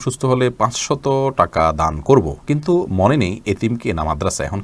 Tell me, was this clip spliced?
no; 0 cuts

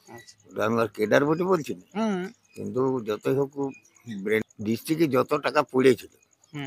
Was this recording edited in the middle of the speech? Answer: yes; 1 cut; at 4.4 s

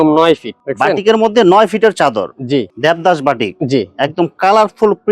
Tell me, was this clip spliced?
yes; 1 cut; at 2.7 s

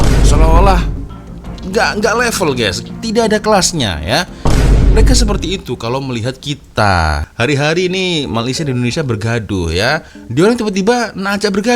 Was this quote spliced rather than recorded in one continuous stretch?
yes; 1 cut; at 7.3 s

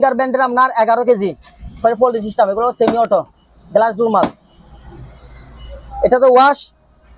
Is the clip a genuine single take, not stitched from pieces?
yes; 0 cuts

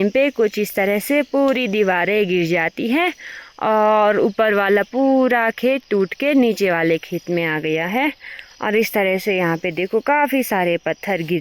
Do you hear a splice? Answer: no; 0 cuts

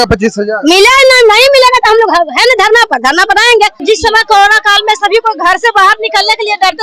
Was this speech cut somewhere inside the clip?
yes; 1 cut; at 3.8 s

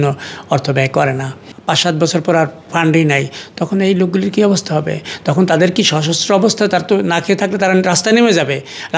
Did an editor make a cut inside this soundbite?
yes; 1 cut; at 1.5 s

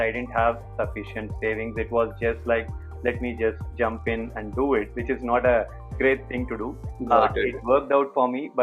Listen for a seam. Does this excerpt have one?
no; 0 cuts

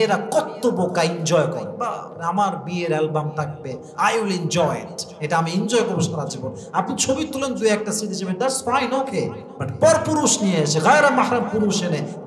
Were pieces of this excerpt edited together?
no; 0 cuts

